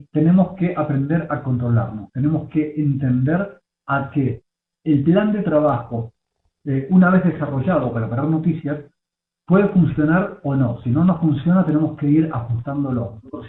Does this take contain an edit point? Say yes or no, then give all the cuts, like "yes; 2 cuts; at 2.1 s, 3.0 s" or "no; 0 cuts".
no; 0 cuts